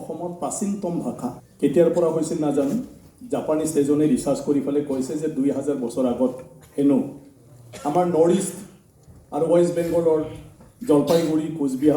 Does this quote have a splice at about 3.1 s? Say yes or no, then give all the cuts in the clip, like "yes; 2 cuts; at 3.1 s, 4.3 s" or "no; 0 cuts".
no; 1 cut; at 1.4 s